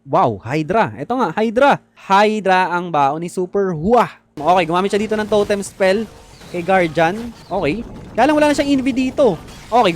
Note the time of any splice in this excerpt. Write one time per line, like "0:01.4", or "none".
0:01.9
0:04.3
0:07.3